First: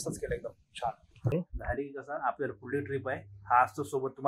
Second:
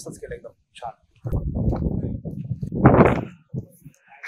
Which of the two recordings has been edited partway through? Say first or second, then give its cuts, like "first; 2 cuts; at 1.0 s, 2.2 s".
first; 1 cut; at 1.3 s